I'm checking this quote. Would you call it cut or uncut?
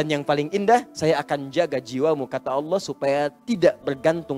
cut